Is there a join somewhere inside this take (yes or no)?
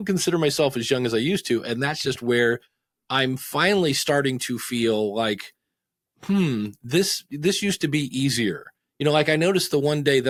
no